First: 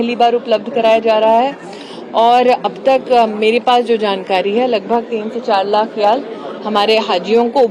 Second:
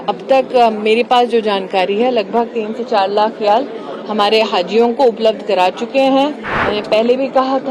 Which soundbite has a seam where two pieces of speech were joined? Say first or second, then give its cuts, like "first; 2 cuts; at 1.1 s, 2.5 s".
second; 1 cut; at 6.5 s